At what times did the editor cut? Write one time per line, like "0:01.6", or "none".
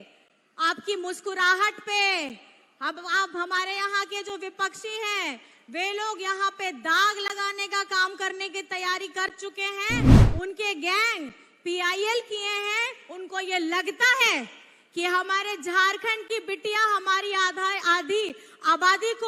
none